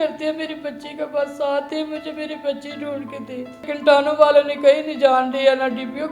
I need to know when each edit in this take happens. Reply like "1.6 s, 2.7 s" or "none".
3.6 s